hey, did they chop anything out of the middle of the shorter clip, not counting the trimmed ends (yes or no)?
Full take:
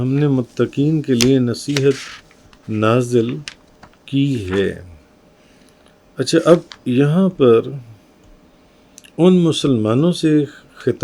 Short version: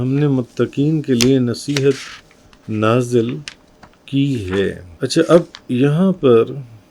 yes